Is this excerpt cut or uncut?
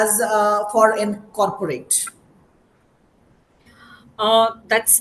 uncut